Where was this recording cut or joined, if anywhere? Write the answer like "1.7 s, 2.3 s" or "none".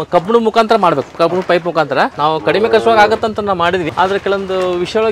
2.1 s, 3.9 s